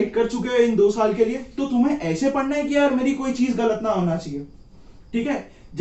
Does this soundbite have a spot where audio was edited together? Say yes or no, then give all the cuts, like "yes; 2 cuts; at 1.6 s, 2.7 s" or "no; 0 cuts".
no; 0 cuts